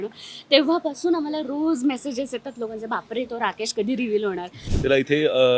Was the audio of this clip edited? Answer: yes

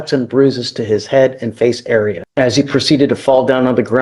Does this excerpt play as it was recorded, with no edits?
no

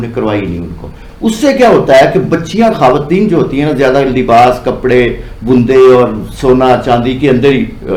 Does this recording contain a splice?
no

